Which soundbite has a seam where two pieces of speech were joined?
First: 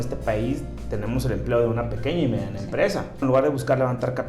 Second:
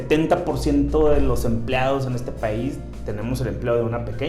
first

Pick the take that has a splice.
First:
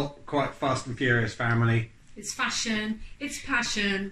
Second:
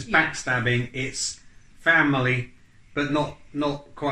first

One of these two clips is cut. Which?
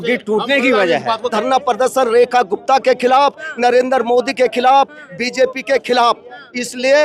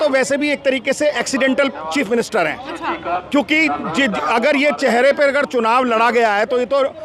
first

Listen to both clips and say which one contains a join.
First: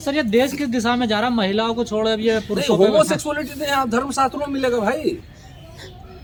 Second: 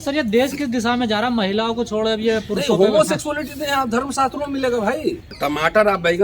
second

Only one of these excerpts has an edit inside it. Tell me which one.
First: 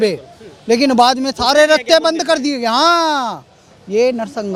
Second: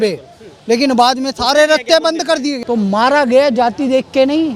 second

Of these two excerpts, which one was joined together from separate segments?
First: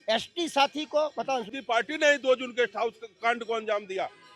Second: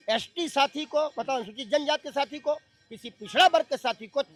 first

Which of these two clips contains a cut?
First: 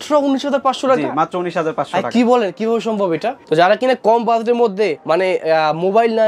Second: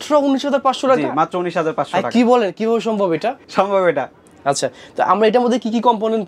first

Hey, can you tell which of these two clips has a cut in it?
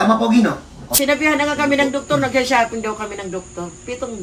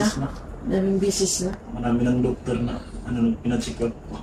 first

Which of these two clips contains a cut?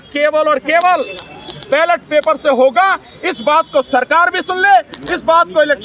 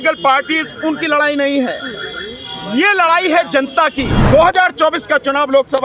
second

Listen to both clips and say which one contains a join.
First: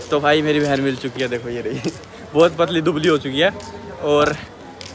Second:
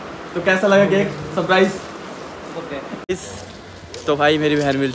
second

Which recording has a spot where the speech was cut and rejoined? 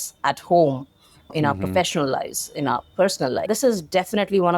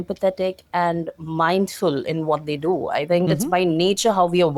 first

